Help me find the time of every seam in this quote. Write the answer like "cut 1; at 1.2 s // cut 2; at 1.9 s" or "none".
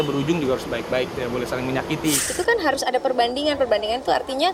cut 1; at 2.3 s